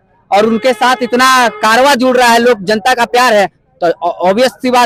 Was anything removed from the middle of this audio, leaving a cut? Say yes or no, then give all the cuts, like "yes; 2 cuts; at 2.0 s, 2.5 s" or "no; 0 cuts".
no; 0 cuts